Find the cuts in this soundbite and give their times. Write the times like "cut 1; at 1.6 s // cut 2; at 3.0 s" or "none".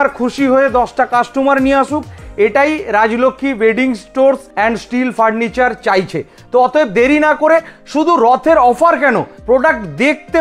none

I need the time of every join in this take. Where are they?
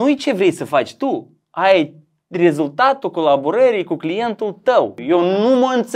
cut 1; at 5.0 s

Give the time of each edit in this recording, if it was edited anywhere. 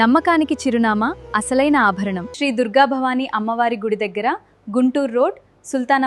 cut 1; at 2.2 s

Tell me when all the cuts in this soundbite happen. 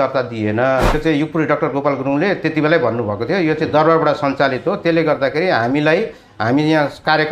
cut 1; at 1.0 s

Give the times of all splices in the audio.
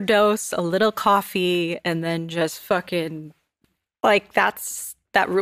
cut 1; at 3.6 s

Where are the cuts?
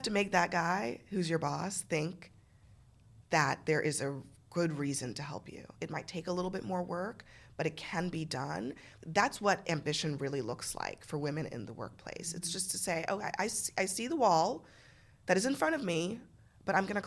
cut 1; at 5.8 s // cut 2; at 8.9 s

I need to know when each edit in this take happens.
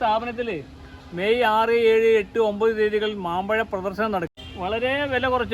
cut 1; at 4.4 s

